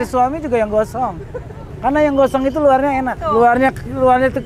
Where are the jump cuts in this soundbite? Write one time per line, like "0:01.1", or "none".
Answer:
0:03.2

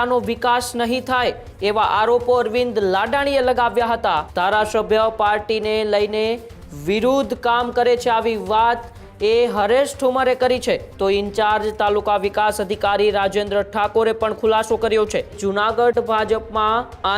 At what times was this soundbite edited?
0:04.3
0:10.9
0:15.3

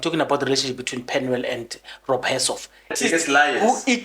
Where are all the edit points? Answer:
0:03.0

